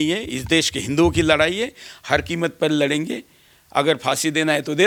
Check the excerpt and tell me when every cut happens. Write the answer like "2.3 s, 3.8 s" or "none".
none